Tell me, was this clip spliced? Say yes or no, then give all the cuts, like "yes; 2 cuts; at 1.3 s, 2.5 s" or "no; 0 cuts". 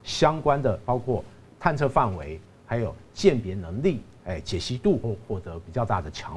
yes; 1 cut; at 5.0 s